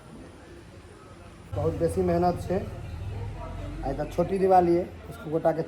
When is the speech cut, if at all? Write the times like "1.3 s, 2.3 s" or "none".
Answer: 1.4 s